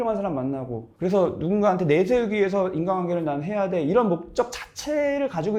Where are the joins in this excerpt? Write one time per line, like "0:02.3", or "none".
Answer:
none